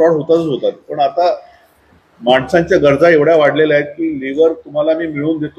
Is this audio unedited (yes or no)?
yes